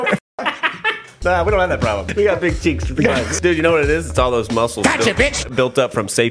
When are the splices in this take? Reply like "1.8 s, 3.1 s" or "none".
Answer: 1.2 s, 2.1 s, 3.3 s